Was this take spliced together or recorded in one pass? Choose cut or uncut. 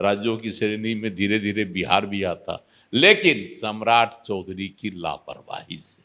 uncut